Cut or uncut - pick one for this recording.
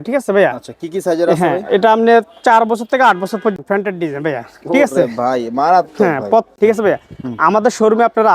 cut